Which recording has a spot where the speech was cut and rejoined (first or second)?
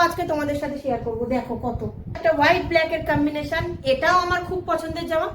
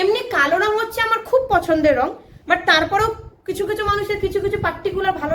first